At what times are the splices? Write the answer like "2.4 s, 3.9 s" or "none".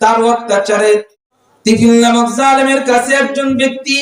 1.1 s